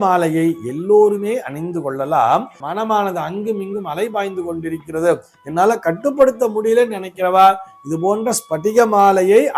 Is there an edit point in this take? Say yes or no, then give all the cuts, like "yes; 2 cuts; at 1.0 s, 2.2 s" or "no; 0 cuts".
yes; 1 cut; at 2.6 s